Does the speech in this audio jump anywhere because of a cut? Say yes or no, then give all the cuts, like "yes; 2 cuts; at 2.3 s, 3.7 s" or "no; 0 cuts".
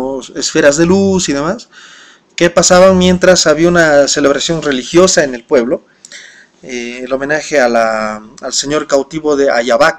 no; 0 cuts